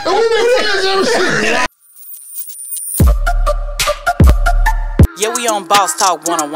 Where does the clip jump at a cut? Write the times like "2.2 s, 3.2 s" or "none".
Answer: 1.7 s